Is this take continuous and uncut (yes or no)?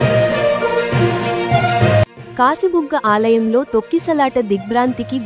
yes